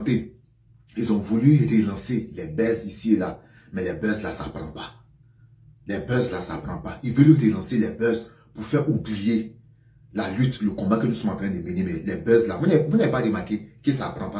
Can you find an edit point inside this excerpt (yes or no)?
no